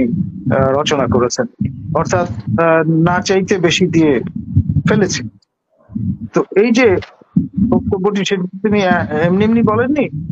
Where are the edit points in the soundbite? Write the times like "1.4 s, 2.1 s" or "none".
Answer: none